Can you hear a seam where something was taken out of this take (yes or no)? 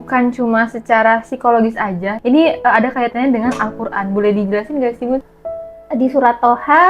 yes